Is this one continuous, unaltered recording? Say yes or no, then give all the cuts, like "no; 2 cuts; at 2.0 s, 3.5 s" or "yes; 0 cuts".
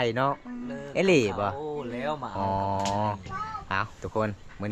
yes; 0 cuts